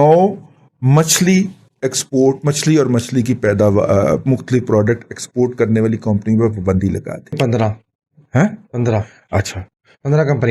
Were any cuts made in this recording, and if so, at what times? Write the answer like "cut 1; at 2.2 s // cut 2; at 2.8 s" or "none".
cut 1; at 7.4 s